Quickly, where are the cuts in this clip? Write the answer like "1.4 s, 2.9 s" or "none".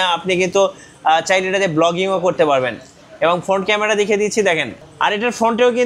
none